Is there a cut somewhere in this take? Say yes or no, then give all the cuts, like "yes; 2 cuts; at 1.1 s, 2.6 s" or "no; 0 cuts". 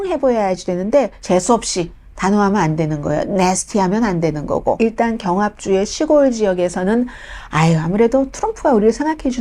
yes; 2 cuts; at 1.2 s, 4.8 s